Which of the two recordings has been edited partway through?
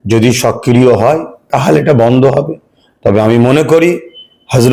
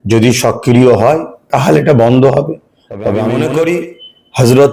second; 1 cut; at 3.3 s

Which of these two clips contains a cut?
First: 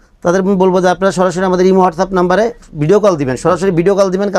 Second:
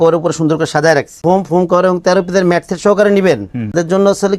second; 1 cut; at 1.2 s

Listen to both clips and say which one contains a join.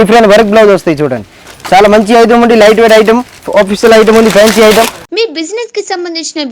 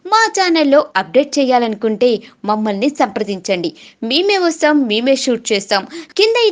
first; 2 cuts; at 1.4 s, 5.0 s

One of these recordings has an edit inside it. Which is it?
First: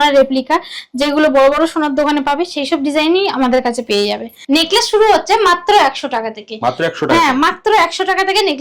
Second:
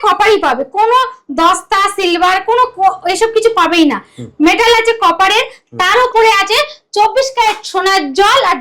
first; 1 cut; at 4.3 s

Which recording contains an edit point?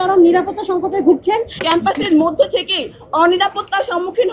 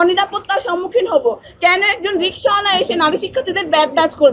first; 1 cut; at 1.6 s

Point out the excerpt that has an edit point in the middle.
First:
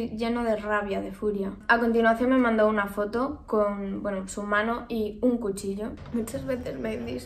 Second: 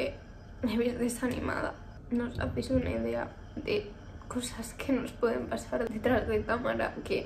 first; 2 cuts; at 1.6 s, 6.0 s

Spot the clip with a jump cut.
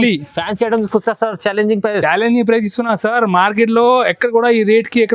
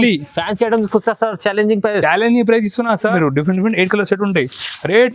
second; 1 cut; at 3.1 s

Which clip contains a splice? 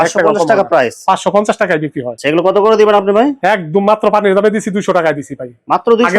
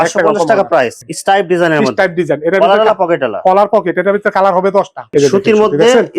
second; 2 cuts; at 1.0 s, 5.0 s

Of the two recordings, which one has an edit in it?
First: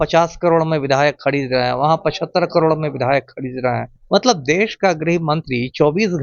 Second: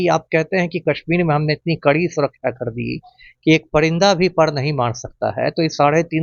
first; 1 cut; at 3.9 s

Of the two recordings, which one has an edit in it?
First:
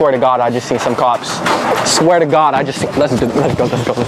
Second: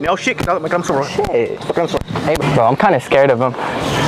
second; 1 cut; at 2.4 s

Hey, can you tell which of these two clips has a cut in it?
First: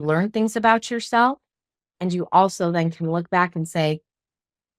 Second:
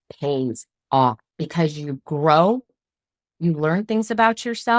second; 1 cut; at 1.3 s

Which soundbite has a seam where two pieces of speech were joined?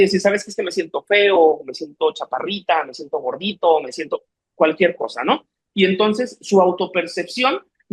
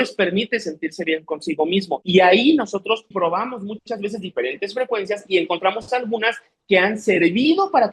second; 2 cuts; at 2.0 s, 3.1 s

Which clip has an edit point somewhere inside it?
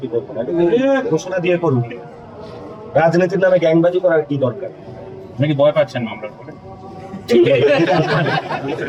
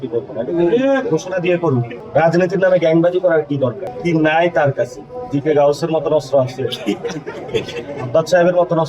second; 2 cuts; at 2.0 s, 3.9 s

